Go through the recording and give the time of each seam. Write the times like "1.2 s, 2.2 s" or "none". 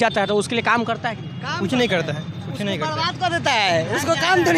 none

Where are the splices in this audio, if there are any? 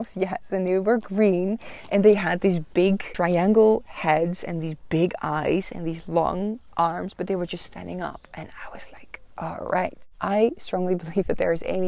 3.1 s, 10.1 s

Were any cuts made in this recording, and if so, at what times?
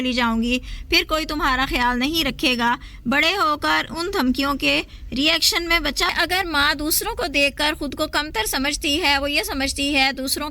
6.1 s

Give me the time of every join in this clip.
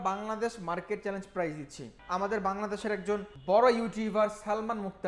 1.9 s, 3.3 s

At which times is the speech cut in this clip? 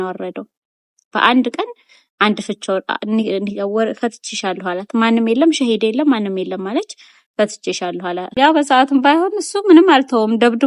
8.3 s

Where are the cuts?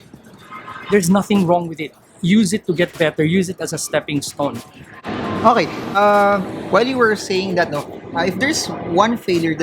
none

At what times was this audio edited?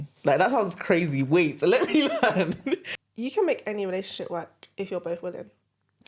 2.9 s

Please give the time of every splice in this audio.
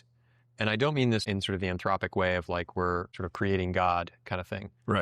1.2 s, 3.2 s

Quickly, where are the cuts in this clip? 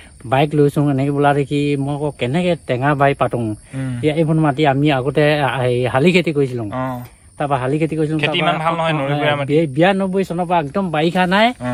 none

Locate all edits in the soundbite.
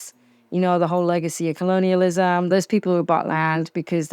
2.5 s

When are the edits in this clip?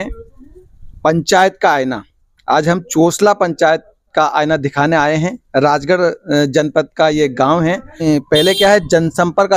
8.1 s

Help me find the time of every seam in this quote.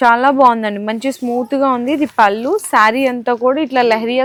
none

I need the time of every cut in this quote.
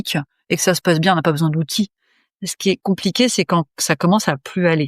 2.8 s

